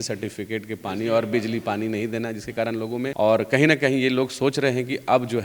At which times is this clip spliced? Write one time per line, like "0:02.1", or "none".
0:03.1